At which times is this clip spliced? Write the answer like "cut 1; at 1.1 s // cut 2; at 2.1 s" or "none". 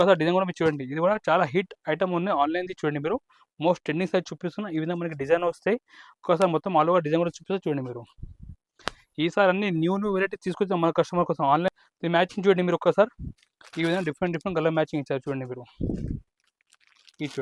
cut 1; at 11.7 s